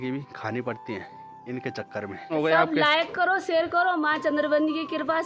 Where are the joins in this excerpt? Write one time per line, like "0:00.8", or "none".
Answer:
0:02.3